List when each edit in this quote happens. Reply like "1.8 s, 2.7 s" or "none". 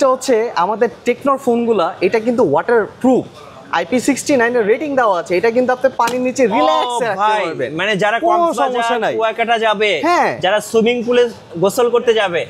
none

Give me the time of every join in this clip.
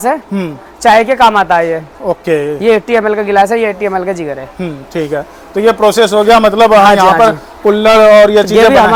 none

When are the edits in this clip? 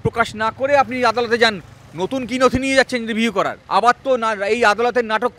3.6 s

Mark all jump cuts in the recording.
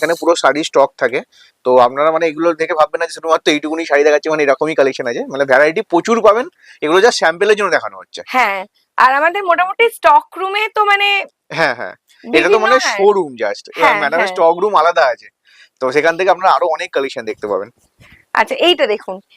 none

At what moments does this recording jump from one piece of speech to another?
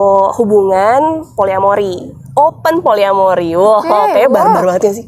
none

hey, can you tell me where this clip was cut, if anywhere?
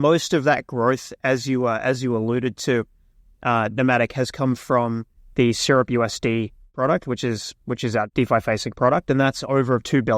6.7 s, 8.1 s

